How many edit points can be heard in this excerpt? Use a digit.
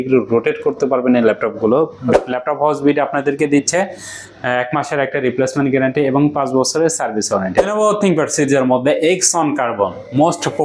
2